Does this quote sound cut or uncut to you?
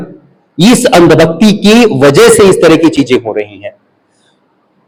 uncut